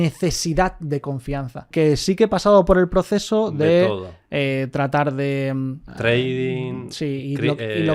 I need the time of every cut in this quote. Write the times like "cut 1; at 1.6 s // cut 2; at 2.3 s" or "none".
cut 1; at 1.7 s // cut 2; at 5.9 s